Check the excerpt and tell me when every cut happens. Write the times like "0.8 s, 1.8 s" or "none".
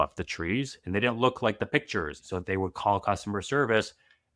2.2 s